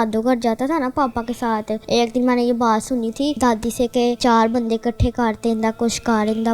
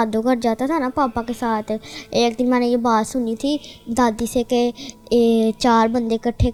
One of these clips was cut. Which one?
first; 3 cuts; at 1.8 s, 3.4 s, 4.2 s

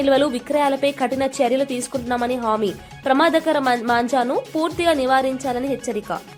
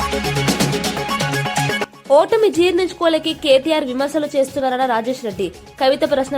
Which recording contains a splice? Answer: second; 1 cut; at 1.6 s

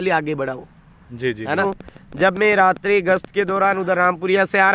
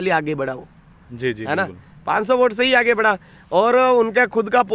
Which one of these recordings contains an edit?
first; 1 cut; at 1.6 s

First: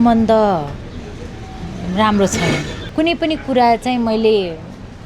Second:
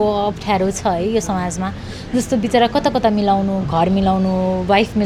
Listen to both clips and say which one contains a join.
first; 1 cut; at 2.8 s

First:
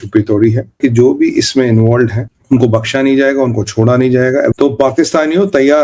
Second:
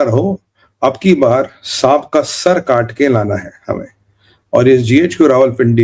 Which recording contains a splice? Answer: first; 3 cuts; at 0.8 s, 2.3 s, 4.5 s

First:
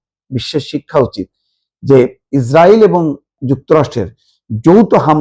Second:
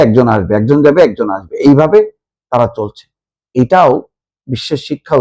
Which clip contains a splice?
first; 2 cuts; at 2.2 s, 3.3 s

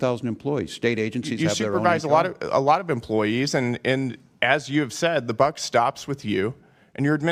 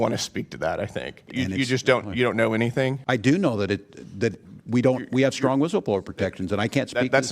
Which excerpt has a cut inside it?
second; 2 cuts; at 1.2 s, 3.0 s

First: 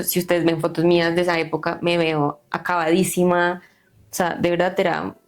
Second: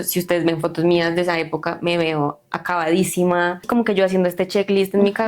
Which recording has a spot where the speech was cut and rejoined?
second; 1 cut; at 3.6 s

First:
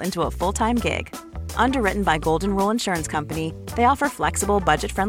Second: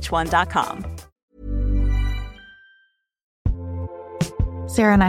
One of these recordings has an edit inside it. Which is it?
second; 1 cut; at 3.3 s

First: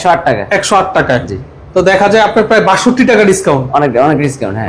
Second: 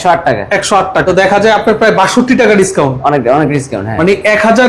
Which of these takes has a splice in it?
second; 1 cut; at 1.0 s

